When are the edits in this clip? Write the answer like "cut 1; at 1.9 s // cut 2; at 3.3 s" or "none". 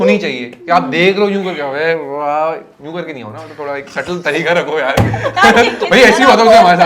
none